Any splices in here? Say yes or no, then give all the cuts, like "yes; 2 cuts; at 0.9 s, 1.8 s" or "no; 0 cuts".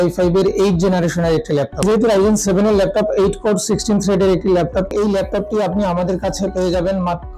yes; 2 cuts; at 1.8 s, 4.9 s